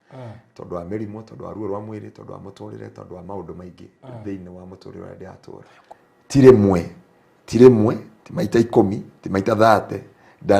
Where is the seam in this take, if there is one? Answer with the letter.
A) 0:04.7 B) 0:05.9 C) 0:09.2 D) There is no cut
B